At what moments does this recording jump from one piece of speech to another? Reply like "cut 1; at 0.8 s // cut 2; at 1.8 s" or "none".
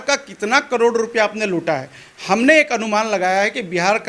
none